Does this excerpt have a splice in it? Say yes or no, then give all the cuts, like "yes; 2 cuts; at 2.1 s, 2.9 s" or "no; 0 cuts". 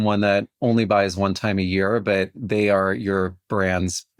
no; 0 cuts